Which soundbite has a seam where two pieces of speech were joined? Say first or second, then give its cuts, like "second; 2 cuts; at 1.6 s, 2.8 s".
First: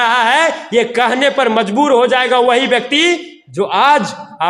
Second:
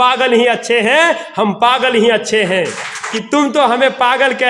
second; 1 cut; at 3.1 s